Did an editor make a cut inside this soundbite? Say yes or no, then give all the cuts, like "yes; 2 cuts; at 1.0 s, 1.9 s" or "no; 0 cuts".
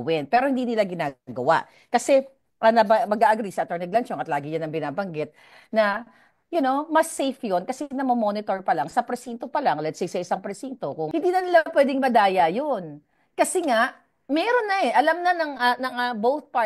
yes; 1 cut; at 11.0 s